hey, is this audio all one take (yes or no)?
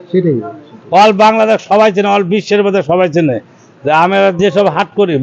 yes